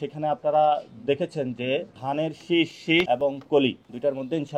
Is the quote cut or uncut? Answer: uncut